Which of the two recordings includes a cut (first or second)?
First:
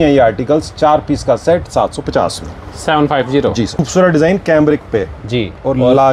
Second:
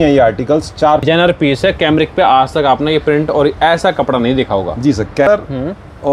second